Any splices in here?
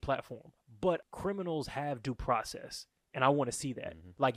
yes; 1 cut; at 1.1 s

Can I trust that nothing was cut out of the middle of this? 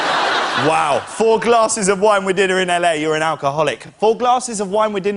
yes; 0 cuts

